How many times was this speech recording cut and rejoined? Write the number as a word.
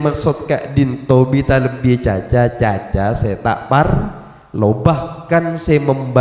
zero